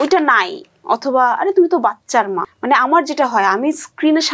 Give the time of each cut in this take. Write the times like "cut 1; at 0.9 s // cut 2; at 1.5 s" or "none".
cut 1; at 2.5 s